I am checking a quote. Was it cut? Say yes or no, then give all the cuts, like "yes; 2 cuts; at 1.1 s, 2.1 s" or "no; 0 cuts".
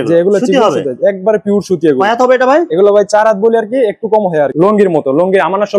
yes; 1 cut; at 4.5 s